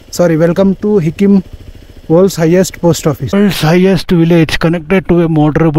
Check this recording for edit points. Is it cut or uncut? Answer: cut